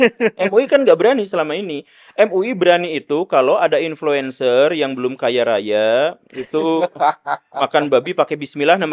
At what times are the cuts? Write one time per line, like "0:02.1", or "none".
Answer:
none